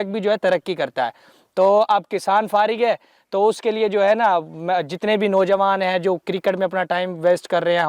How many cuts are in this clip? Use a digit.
0